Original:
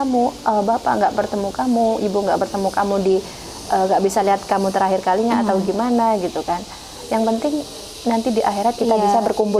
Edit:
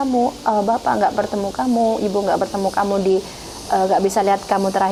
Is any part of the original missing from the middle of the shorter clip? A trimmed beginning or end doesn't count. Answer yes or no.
no